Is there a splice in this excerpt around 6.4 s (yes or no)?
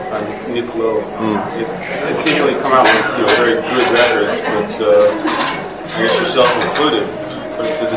yes